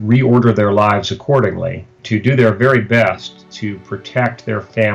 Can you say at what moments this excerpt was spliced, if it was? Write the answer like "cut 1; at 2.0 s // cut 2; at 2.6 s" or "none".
cut 1; at 2.0 s